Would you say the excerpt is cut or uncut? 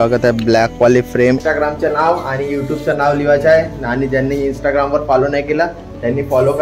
cut